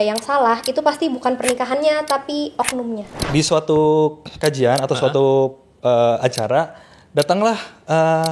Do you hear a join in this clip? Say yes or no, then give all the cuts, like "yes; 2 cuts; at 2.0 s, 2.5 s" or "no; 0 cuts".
yes; 1 cut; at 3.1 s